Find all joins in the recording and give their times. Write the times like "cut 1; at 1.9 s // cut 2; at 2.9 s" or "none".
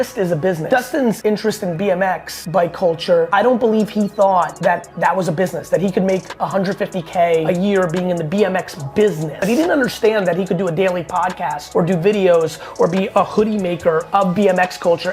cut 1; at 0.9 s // cut 2; at 2.3 s // cut 3; at 3.3 s // cut 4; at 4.5 s // cut 5; at 7.4 s // cut 6; at 9.3 s // cut 7; at 11.6 s